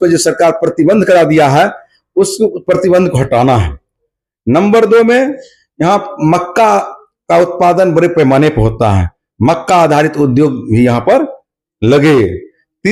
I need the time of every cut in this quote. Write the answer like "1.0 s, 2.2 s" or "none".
none